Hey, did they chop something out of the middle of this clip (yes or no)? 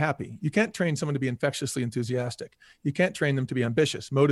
no